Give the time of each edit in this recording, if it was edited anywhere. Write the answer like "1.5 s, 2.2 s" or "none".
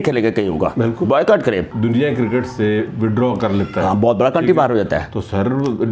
1.7 s